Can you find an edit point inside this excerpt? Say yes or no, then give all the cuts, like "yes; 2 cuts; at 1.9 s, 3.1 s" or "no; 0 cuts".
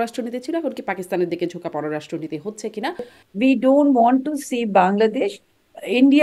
yes; 1 cut; at 3.2 s